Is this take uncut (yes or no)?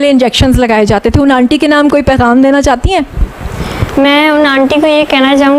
yes